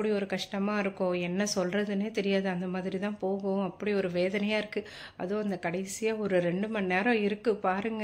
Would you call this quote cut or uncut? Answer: uncut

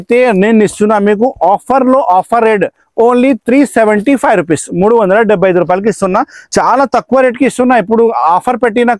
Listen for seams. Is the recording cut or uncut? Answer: cut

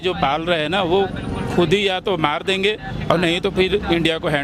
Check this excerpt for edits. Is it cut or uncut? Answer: uncut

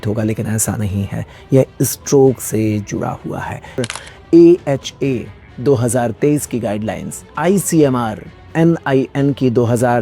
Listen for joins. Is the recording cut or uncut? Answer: cut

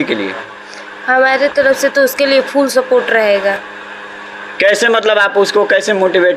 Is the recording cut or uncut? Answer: uncut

